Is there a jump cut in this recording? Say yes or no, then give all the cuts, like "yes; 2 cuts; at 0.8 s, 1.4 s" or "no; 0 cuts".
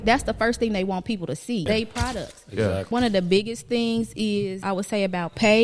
yes; 3 cuts; at 1.7 s, 2.9 s, 4.6 s